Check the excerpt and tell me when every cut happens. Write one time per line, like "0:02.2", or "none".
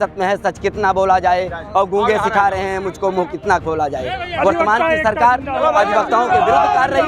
none